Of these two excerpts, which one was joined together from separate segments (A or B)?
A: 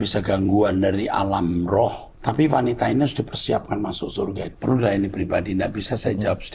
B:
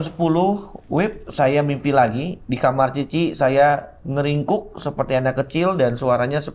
A